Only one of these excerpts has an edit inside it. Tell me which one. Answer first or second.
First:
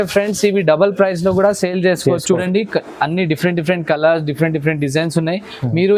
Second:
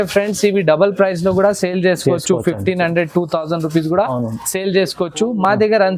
first